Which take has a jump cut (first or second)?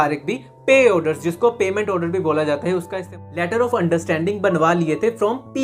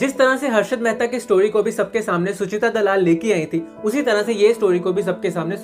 first